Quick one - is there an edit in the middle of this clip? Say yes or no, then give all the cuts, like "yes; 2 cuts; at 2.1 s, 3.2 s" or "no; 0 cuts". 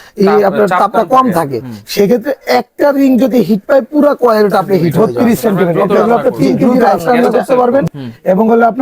yes; 1 cut; at 4.9 s